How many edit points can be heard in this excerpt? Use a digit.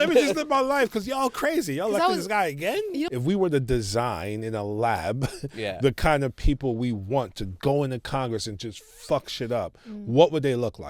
1